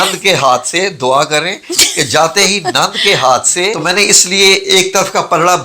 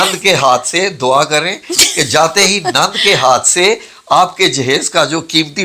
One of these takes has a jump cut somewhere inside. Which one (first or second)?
first